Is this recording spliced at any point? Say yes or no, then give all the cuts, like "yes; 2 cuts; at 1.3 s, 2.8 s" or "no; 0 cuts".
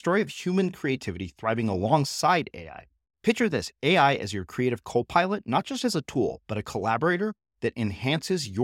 no; 0 cuts